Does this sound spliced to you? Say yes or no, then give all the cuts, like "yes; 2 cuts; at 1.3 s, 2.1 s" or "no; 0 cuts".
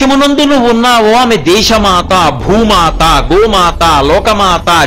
no; 0 cuts